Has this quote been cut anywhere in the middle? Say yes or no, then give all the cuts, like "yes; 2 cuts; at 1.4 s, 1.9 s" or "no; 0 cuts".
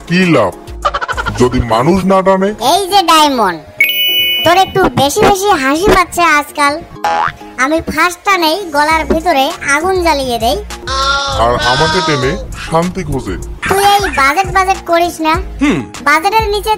yes; 4 cuts; at 2.6 s, 6.9 s, 10.8 s, 13.5 s